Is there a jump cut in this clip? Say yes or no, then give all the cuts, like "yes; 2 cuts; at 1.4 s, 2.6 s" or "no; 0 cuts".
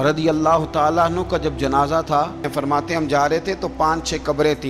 yes; 1 cut; at 2.5 s